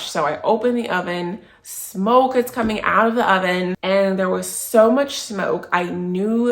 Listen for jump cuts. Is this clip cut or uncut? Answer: cut